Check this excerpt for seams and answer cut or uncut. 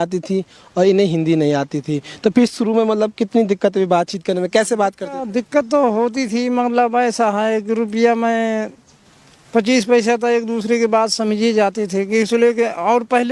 uncut